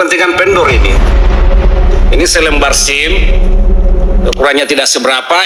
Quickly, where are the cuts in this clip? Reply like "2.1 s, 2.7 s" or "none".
none